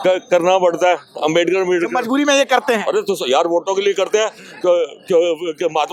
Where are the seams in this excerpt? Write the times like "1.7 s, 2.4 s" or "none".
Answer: none